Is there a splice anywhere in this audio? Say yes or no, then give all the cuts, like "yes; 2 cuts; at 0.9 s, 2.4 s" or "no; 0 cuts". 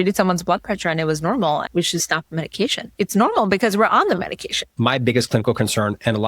yes; 3 cuts; at 1.6 s, 2.8 s, 4.7 s